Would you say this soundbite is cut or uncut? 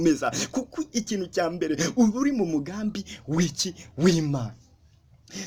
uncut